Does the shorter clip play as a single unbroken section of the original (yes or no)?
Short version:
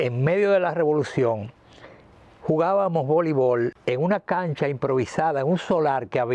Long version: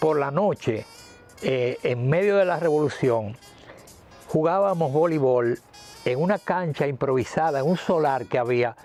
no